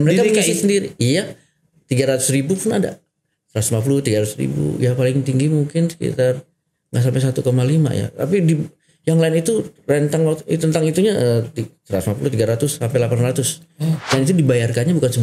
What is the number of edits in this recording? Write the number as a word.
one